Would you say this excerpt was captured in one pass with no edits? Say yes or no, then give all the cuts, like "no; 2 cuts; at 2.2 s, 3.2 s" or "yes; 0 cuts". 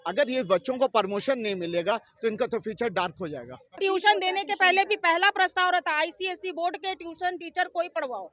no; 1 cut; at 3.8 s